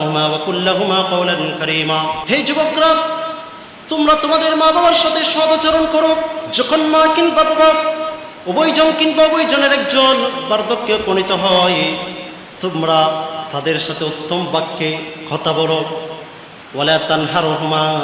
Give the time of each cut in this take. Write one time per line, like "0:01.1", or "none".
0:02.2
0:06.4